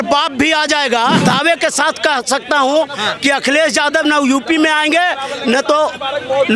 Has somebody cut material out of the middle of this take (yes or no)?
yes